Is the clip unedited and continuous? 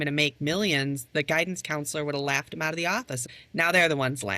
no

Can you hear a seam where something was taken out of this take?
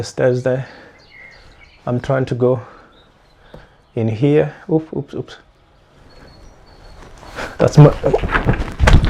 yes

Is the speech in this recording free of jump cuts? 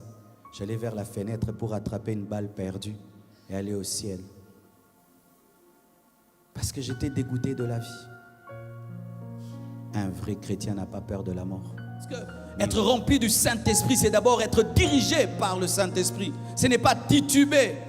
no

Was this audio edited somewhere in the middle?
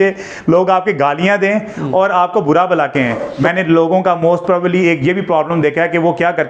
yes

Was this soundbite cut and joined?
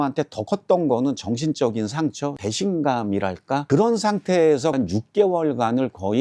no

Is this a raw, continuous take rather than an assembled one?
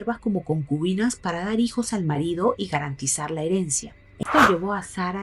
no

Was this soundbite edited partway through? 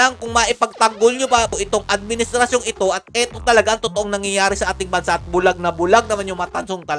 no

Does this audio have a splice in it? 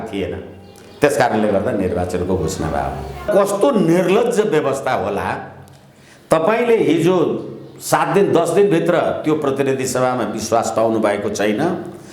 yes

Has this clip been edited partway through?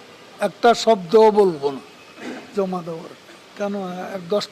yes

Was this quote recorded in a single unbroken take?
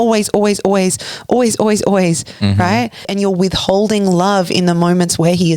no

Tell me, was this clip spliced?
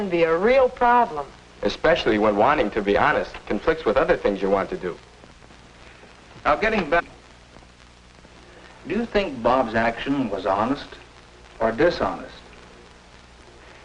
no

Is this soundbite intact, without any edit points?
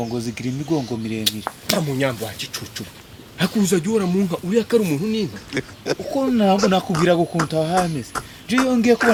yes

